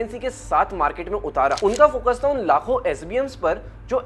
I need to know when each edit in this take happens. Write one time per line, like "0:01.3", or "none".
0:01.6